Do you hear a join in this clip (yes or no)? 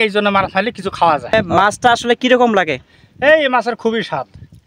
yes